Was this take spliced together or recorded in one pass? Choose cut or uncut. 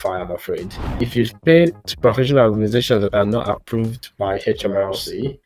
cut